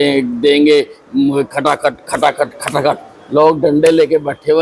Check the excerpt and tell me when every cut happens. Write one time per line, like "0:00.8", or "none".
none